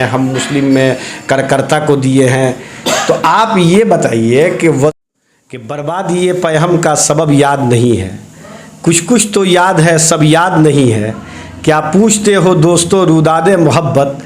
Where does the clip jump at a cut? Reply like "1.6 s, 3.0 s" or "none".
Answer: 4.9 s